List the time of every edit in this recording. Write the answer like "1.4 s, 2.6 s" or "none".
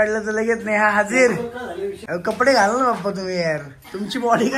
2.0 s